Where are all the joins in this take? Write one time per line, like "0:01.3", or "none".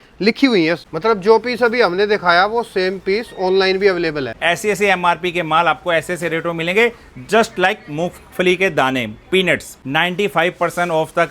0:00.9
0:04.3
0:09.8

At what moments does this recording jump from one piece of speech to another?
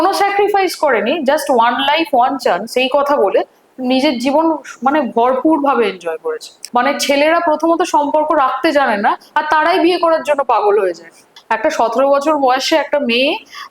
0:06.6
0:11.3

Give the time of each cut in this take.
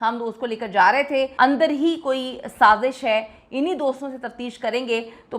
0:01.3

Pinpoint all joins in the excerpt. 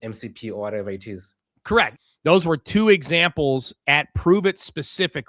0:01.9

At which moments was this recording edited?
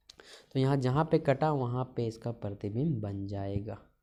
none

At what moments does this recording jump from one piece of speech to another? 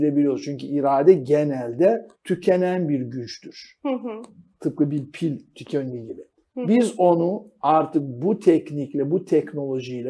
0:02.1

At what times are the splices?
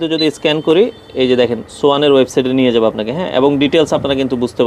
none

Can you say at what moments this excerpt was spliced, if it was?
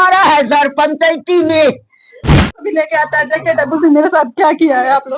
0:02.4

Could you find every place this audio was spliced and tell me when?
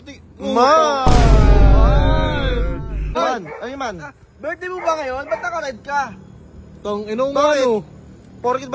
0:03.1

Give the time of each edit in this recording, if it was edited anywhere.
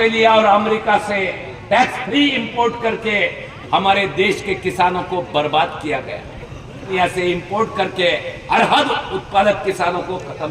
0:06.9

